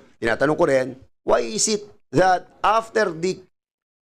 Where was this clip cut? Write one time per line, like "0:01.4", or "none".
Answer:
none